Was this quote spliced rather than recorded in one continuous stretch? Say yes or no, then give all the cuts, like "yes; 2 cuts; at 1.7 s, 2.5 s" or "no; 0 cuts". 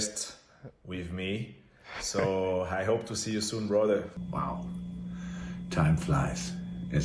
yes; 1 cut; at 4.1 s